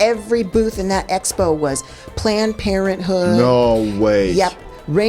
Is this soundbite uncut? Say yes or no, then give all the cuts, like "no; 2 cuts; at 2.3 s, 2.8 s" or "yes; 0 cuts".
yes; 0 cuts